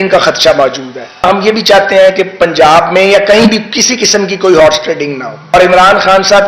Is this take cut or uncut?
cut